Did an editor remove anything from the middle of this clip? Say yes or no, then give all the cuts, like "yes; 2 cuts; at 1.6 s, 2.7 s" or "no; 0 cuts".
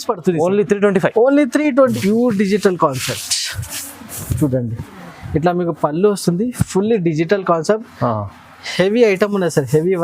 yes; 1 cut; at 2.0 s